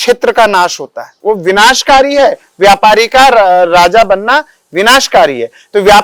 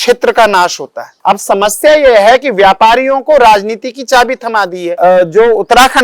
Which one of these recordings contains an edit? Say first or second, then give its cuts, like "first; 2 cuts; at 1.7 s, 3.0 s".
second; 2 cuts; at 1.1 s, 5.0 s